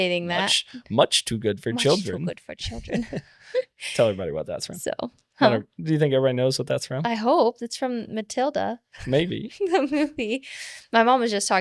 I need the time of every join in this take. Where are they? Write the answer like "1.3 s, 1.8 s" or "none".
none